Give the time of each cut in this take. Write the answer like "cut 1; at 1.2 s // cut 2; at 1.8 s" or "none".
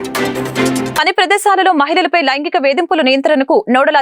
cut 1; at 0.9 s

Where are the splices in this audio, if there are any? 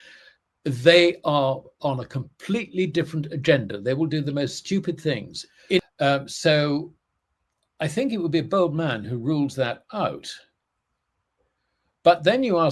cut 1; at 5.8 s

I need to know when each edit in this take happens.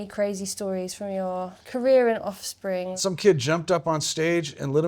cut 1; at 1.6 s // cut 2; at 2.9 s

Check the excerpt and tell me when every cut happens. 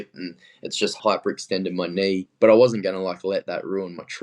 cut 1; at 0.9 s // cut 2; at 2.3 s

